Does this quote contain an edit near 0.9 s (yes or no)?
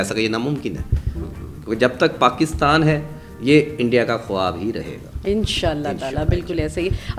no